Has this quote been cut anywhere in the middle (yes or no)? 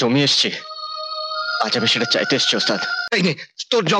yes